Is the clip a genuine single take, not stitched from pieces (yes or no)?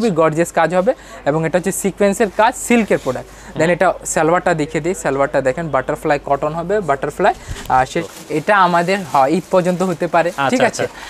no